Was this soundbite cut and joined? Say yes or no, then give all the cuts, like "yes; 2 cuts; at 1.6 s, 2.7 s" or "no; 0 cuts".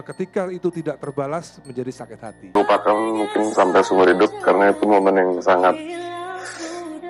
yes; 1 cut; at 2.5 s